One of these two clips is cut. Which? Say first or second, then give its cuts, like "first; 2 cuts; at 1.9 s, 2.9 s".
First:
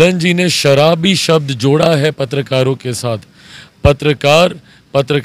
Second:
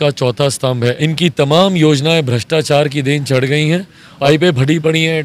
second; 2 cuts; at 1.0 s, 4.0 s